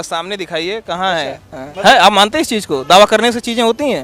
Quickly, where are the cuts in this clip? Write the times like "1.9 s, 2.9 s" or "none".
1.6 s